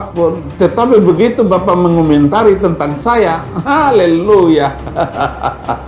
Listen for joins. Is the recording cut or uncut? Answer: uncut